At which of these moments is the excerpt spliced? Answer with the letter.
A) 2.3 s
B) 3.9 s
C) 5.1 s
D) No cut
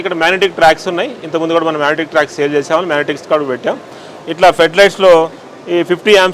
D